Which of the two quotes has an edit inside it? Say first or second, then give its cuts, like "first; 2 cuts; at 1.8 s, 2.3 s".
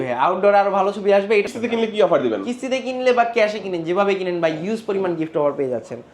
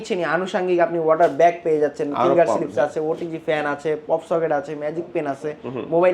first; 1 cut; at 1.5 s